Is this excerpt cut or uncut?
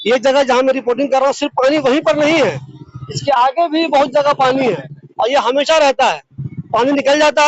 uncut